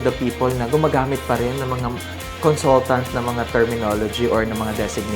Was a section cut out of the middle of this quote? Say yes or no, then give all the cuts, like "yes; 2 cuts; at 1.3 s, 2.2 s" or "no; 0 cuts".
no; 0 cuts